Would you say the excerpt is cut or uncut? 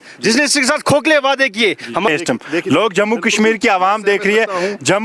cut